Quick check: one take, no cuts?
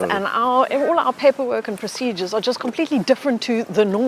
yes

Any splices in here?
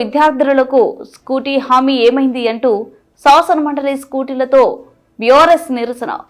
no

